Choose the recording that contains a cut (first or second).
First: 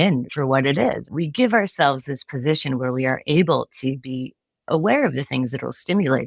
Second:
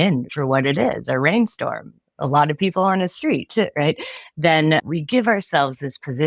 first